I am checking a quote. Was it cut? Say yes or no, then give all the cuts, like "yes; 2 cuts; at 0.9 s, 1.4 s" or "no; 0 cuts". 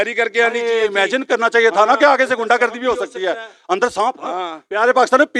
no; 0 cuts